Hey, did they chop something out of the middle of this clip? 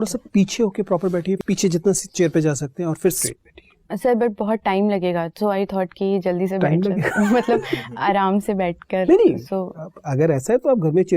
yes; 2 cuts; at 1.4 s, 3.2 s

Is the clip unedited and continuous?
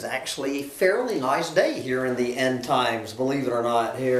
yes; 0 cuts

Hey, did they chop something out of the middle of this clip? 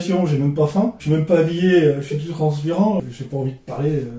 yes; 2 cuts; at 1.0 s, 3.0 s

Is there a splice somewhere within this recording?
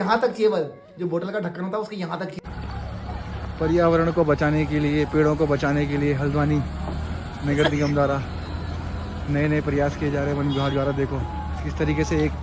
yes; 1 cut; at 2.4 s

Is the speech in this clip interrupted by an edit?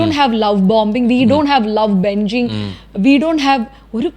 no; 0 cuts

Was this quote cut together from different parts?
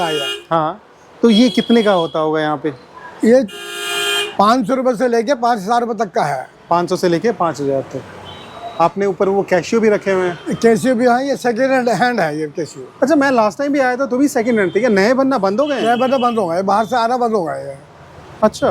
no; 0 cuts

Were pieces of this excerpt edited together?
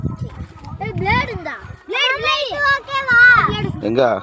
yes; 1 cut; at 2.0 s

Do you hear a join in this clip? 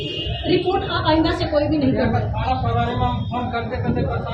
no; 0 cuts

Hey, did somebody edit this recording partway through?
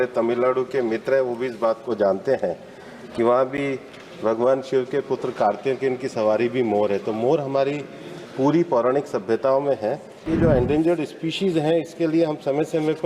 yes; 1 cut; at 10.2 s

